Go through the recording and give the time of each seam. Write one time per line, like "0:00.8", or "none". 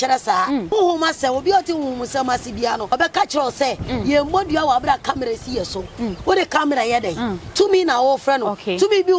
0:00.7
0:02.9